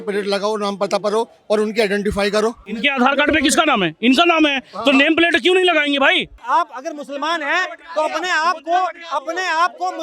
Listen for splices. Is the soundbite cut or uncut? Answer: cut